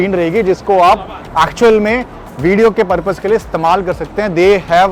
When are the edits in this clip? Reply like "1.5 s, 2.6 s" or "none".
none